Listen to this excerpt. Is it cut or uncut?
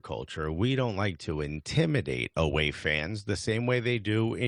uncut